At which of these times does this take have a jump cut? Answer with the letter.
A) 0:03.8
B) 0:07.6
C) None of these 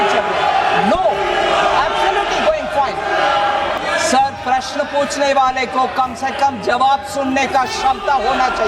A